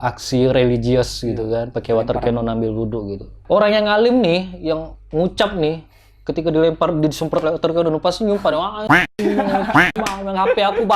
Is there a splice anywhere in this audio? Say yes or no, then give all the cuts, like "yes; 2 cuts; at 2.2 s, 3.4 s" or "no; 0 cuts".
yes; 1 cut; at 3.4 s